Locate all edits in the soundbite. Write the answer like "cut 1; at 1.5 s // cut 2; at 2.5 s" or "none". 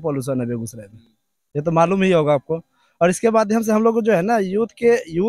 none